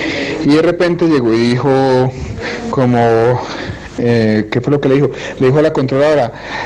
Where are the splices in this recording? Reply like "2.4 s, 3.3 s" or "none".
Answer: 1.8 s

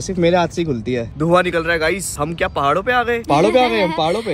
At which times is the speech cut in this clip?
1.1 s, 2.1 s

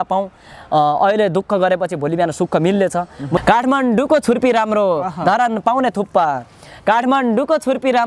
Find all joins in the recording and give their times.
3.4 s

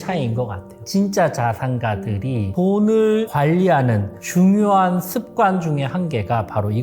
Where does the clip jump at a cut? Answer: 0.9 s, 2.5 s, 3.3 s

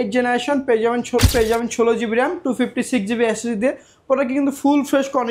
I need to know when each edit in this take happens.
1.3 s

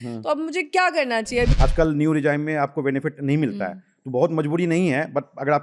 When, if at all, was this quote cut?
1.5 s

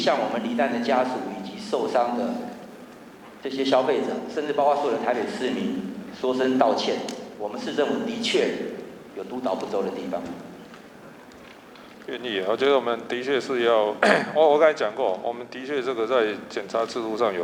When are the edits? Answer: none

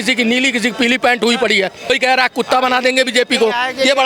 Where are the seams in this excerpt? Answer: 1.9 s

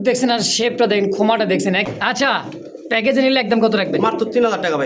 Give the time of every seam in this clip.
1.9 s

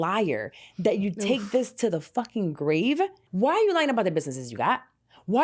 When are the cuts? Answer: 3.2 s

